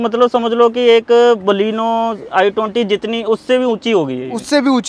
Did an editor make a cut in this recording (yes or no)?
no